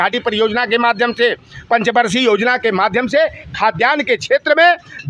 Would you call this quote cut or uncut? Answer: uncut